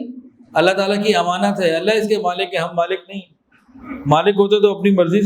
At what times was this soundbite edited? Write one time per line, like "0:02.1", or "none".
none